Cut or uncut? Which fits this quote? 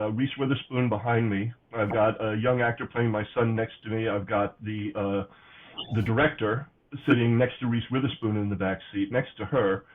uncut